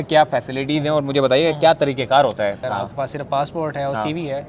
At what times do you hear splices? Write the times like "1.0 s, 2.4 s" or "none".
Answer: 2.6 s